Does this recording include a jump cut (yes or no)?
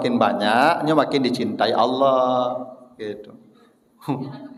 no